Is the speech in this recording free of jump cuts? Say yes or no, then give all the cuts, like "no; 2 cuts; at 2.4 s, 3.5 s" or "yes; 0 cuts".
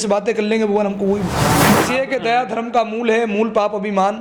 no; 1 cut; at 1.5 s